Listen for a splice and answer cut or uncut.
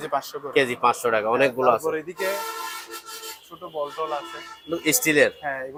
uncut